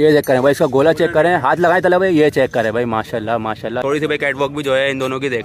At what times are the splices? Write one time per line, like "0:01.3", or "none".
0:03.8